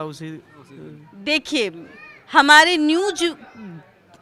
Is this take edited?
no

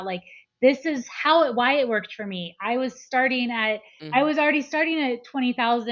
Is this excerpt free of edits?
no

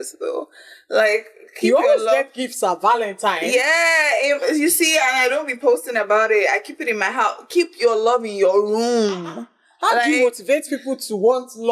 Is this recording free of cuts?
yes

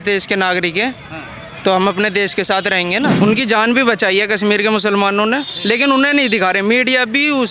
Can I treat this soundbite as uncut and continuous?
no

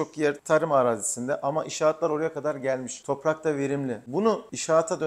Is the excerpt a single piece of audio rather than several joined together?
yes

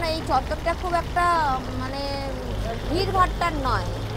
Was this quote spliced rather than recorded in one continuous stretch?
no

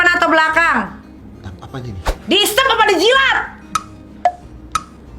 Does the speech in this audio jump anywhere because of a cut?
yes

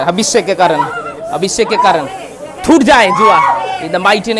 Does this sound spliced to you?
no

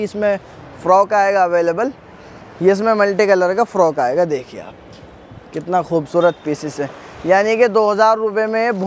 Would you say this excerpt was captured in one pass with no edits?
yes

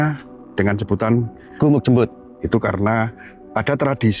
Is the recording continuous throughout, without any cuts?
no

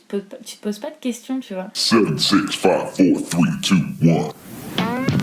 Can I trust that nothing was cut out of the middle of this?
no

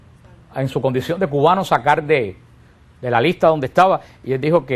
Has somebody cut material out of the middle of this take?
yes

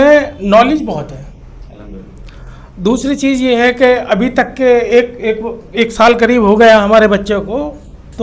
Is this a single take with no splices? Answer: yes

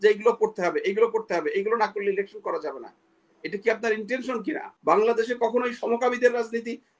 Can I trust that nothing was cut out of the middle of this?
no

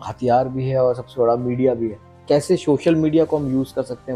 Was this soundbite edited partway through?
yes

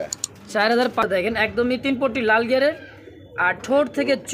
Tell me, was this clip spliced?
yes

